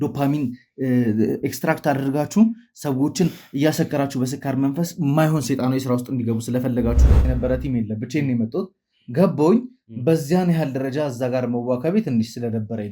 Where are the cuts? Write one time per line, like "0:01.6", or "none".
0:07.1